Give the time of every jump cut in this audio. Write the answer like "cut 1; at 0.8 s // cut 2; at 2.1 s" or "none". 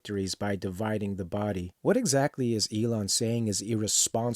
cut 1; at 1.6 s